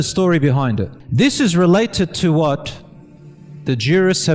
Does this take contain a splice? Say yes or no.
yes